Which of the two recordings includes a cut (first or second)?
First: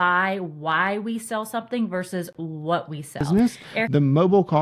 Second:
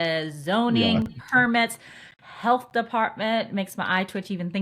first